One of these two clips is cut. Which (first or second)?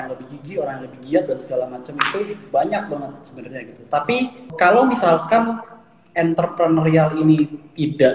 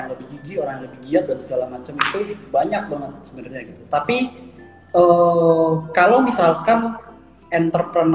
first